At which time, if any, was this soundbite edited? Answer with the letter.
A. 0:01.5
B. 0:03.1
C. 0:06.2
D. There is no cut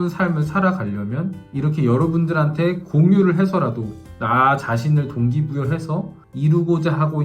C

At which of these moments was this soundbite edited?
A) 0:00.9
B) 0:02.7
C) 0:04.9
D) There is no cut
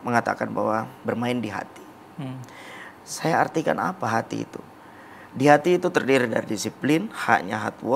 A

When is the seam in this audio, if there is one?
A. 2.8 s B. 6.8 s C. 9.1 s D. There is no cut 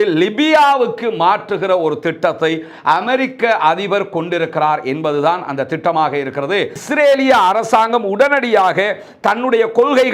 B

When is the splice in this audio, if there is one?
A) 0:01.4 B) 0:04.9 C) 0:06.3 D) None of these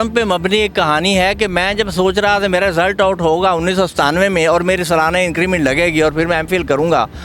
D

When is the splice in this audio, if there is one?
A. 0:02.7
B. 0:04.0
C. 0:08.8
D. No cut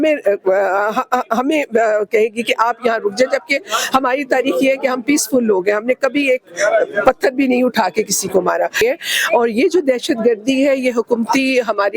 C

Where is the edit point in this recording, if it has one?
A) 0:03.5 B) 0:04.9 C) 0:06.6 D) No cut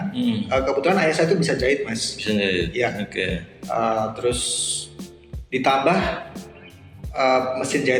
D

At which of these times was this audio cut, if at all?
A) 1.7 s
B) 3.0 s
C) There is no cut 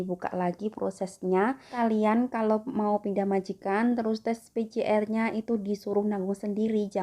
A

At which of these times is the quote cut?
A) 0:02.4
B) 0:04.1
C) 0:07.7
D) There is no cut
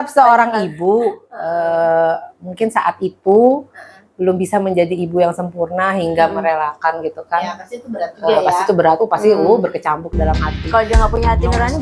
D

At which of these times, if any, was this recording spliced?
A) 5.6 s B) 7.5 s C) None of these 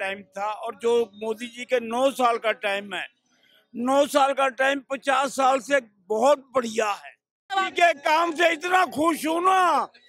B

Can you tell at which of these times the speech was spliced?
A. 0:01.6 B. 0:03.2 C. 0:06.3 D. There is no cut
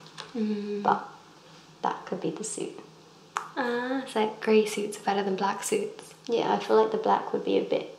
D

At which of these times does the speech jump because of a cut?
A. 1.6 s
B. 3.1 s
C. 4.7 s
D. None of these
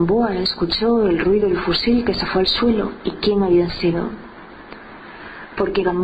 C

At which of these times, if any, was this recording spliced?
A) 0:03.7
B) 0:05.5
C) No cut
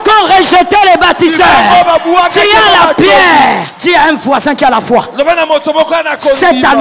A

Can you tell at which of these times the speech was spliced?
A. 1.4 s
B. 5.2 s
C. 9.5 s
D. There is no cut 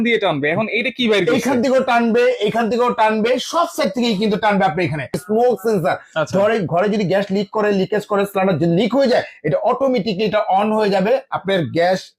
B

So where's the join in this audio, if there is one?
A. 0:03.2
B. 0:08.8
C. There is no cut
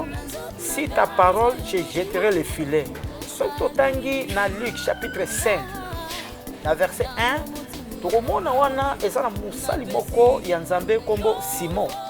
A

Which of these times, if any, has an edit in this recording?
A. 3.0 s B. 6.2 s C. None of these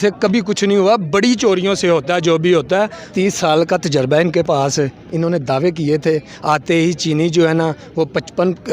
A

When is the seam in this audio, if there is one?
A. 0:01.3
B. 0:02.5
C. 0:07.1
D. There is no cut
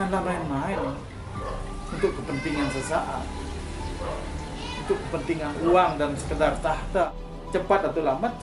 C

